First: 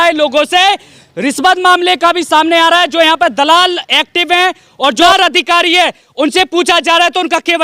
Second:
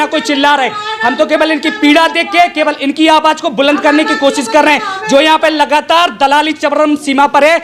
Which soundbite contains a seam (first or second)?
first